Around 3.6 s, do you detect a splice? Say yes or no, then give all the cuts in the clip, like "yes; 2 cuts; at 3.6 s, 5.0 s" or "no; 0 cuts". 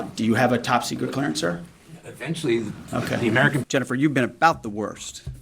yes; 1 cut; at 3.6 s